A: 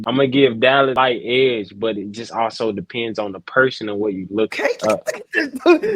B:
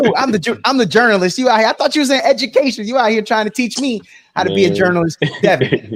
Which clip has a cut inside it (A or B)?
A